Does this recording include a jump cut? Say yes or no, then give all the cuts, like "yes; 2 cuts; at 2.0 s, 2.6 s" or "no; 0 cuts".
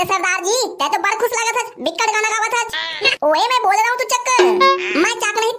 yes; 1 cut; at 3.0 s